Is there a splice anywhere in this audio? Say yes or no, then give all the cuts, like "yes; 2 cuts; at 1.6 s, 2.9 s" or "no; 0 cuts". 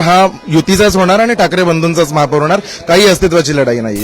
no; 0 cuts